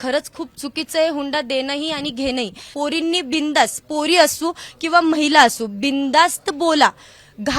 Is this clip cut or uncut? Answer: cut